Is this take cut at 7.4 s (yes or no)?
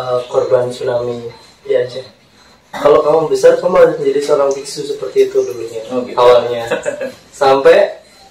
no